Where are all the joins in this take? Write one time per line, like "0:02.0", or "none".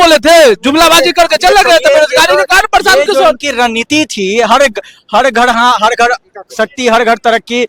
none